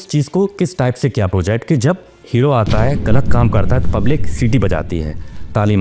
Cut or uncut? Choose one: uncut